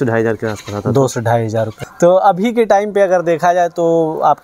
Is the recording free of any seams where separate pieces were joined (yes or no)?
no